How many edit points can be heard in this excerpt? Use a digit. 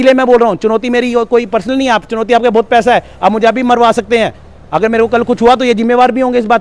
0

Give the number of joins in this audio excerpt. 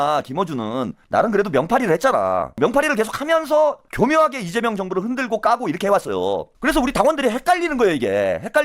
4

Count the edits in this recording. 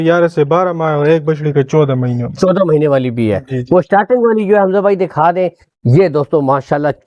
0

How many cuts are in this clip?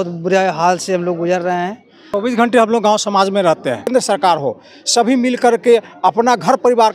2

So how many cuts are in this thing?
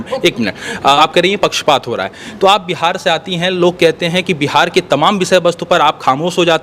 1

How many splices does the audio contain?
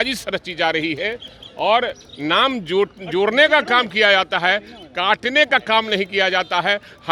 0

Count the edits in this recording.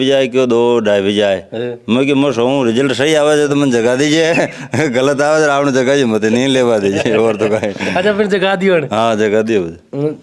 0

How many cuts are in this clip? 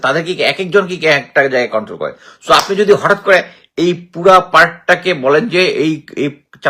0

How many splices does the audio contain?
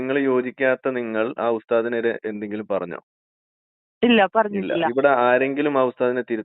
1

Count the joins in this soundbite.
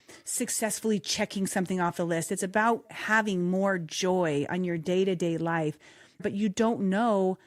1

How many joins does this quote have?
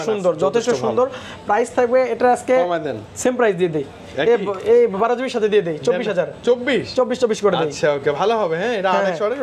0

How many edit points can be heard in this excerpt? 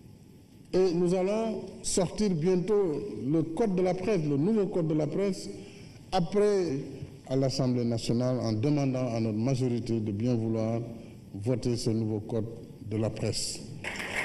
0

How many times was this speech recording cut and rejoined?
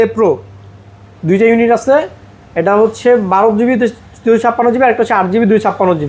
0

